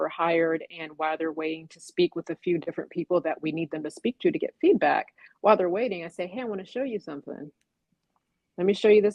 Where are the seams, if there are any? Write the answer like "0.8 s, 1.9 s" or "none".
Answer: none